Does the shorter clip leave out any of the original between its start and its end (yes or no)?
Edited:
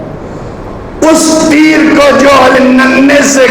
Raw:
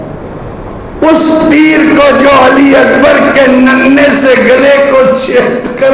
yes